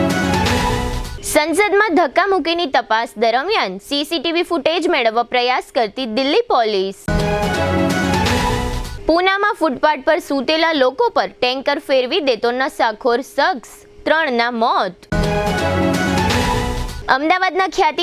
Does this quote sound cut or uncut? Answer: cut